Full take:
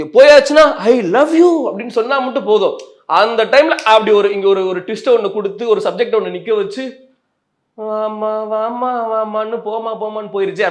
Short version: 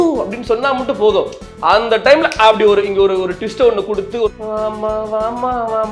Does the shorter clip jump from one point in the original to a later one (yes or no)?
yes